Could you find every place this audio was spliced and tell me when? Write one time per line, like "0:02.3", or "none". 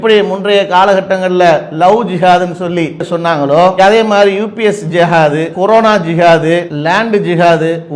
none